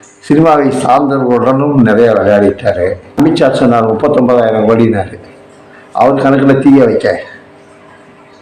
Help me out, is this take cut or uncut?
cut